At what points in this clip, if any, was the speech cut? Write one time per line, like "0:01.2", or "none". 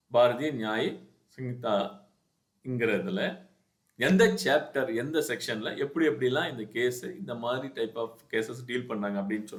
none